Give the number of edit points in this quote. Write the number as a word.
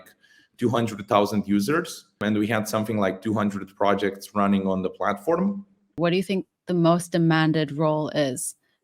two